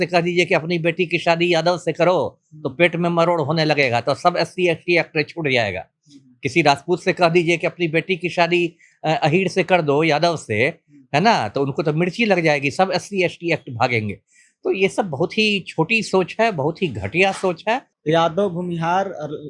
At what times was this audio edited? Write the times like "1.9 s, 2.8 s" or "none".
17.9 s